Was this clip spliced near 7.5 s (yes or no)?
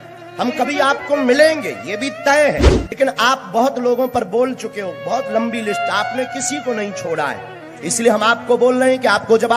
no